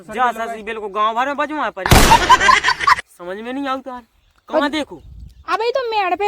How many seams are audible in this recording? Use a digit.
2